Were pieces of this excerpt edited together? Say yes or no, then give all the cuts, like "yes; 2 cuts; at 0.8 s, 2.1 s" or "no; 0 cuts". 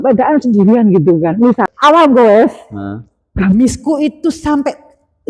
yes; 1 cut; at 1.6 s